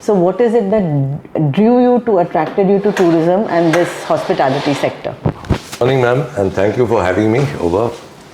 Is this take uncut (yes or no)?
no